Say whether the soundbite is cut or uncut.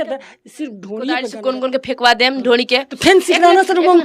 cut